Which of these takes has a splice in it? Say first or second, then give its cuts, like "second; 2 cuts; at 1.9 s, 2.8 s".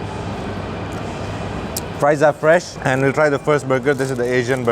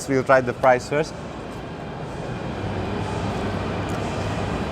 first; 1 cut; at 2.7 s